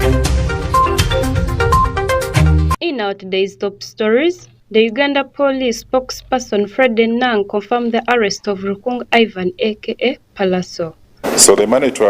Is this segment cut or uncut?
cut